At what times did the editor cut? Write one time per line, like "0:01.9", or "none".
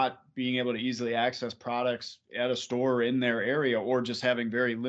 none

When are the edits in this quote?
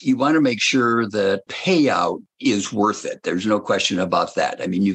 0:01.5
0:02.3

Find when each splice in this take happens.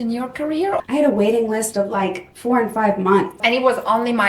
0:00.8
0:03.4

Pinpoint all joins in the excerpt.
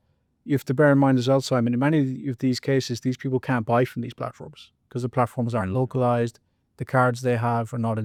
none

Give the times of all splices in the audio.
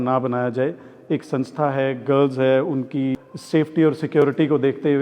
0:03.2

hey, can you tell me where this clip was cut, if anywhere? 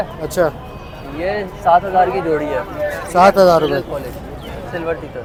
none

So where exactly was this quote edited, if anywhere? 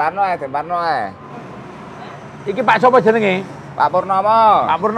0:01.3

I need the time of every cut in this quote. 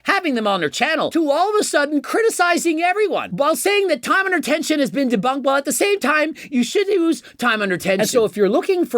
0:08.0

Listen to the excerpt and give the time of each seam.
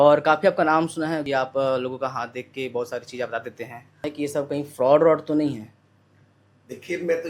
0:01.2
0:04.0

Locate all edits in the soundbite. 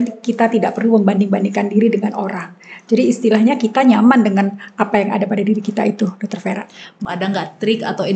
0:06.9

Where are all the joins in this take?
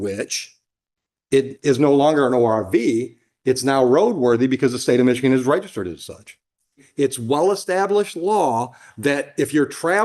0:06.8

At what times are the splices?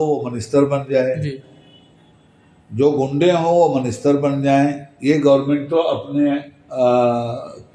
none

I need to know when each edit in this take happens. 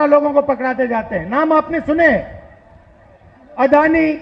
none

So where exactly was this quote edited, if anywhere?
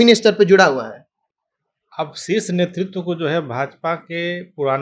none

